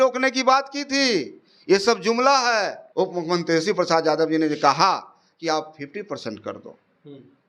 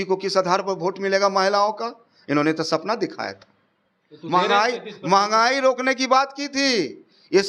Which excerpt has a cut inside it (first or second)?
first